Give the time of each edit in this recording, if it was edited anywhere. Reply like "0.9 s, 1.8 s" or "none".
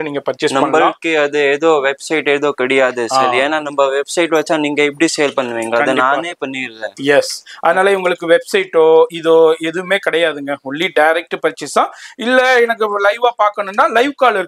none